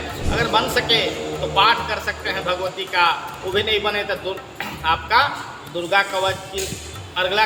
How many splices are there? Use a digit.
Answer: 0